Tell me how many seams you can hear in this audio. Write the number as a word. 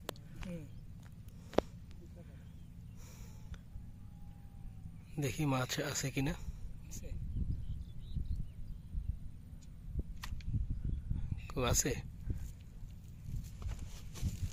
zero